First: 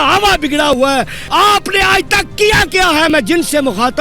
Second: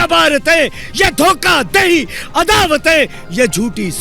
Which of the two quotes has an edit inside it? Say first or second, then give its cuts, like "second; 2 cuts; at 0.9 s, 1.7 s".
first; 1 cut; at 1.2 s